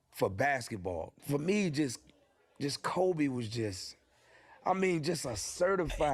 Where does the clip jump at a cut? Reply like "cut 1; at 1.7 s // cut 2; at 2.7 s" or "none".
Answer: cut 1; at 1.1 s

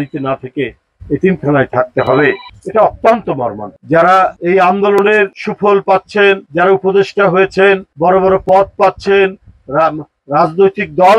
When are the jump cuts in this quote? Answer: cut 1; at 3.8 s

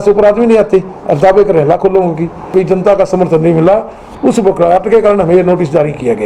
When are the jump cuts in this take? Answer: cut 1; at 2.5 s

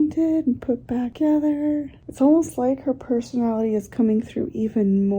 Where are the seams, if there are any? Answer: cut 1; at 1.1 s // cut 2; at 2.0 s

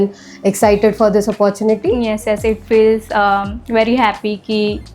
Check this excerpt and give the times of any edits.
none

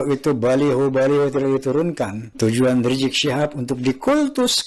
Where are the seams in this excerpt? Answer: cut 1; at 2.2 s

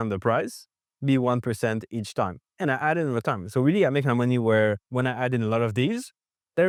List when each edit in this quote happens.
none

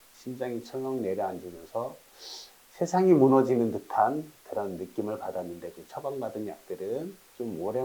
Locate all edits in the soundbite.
cut 1; at 5.7 s

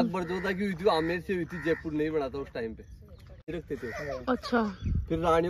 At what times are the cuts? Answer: cut 1; at 3.6 s

